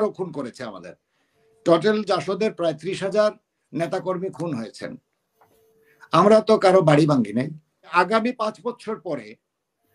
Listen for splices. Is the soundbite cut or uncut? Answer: cut